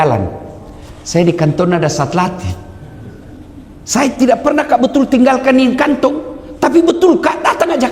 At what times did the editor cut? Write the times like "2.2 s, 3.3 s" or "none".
none